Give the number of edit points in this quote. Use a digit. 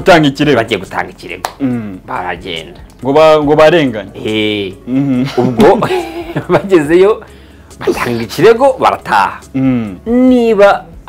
2